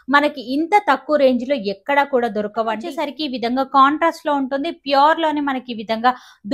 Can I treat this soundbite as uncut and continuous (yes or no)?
no